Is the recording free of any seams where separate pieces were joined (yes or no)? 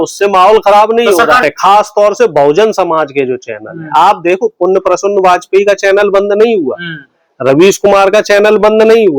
no